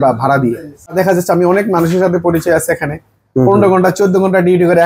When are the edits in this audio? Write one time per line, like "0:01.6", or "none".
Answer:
0:00.9